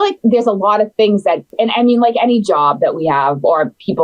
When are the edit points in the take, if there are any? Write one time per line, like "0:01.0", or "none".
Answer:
0:01.5